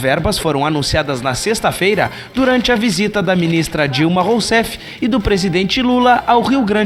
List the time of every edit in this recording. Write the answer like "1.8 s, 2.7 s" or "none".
none